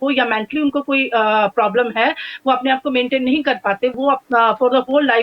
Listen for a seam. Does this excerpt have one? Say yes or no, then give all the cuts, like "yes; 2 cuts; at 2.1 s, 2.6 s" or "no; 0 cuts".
yes; 1 cut; at 3.9 s